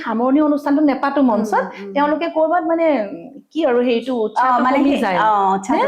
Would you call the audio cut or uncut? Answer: uncut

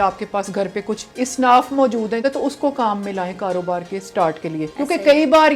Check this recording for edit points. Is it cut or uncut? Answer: cut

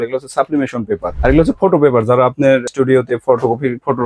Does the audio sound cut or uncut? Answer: cut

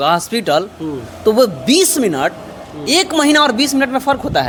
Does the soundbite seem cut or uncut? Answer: uncut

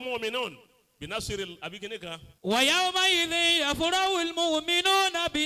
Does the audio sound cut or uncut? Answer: cut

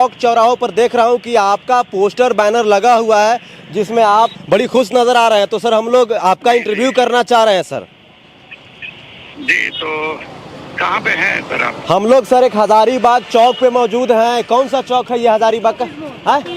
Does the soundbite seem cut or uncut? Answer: uncut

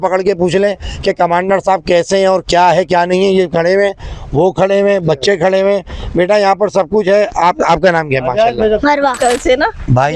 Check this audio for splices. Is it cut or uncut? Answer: cut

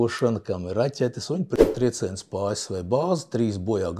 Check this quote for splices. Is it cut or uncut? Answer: cut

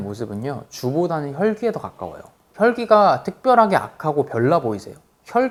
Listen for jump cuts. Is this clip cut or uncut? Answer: uncut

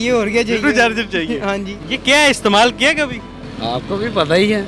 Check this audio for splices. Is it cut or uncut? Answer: uncut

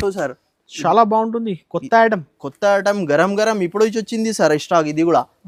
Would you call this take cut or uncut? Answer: uncut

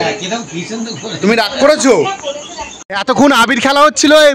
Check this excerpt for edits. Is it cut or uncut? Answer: cut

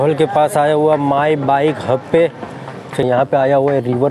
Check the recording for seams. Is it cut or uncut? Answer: cut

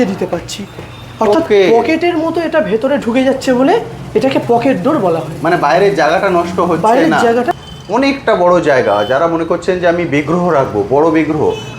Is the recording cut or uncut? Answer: cut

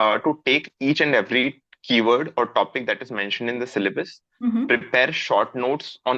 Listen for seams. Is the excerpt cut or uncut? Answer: uncut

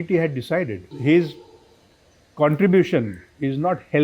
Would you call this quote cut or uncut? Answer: cut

